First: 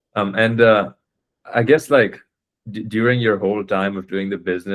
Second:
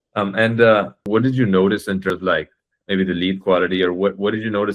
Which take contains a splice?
second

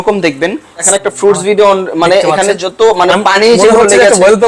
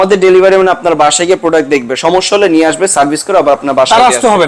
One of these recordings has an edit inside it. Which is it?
first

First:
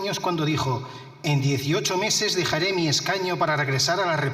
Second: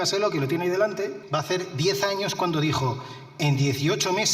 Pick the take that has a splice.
second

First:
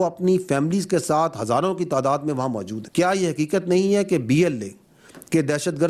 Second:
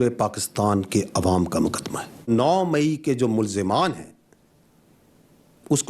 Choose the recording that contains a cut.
second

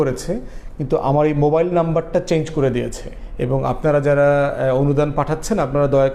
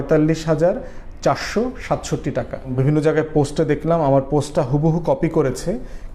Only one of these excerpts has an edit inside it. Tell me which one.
second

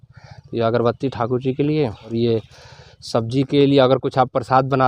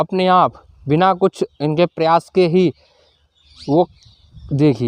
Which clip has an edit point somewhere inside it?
first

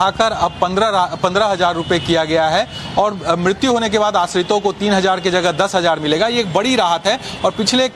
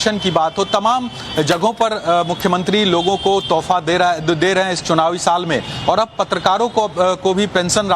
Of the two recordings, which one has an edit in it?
second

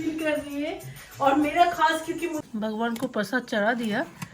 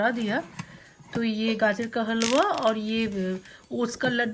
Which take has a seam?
first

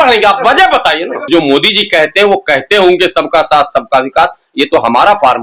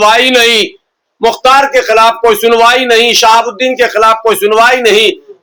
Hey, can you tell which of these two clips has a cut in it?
first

